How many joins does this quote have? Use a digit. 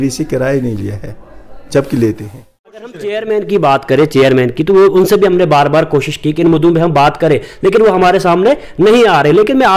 1